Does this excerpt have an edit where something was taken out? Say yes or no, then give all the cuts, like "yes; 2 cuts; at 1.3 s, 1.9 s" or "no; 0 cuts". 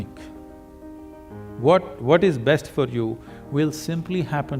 no; 0 cuts